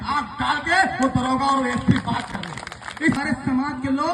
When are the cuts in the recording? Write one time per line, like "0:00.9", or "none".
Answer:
0:03.2